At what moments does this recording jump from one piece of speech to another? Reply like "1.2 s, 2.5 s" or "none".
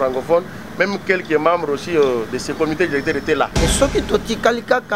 3.5 s